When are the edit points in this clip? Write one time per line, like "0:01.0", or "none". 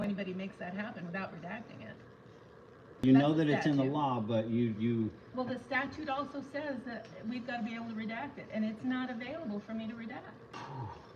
none